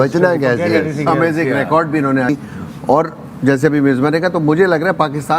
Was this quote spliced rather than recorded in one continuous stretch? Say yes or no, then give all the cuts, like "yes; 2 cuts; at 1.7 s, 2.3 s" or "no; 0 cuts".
yes; 1 cut; at 2.3 s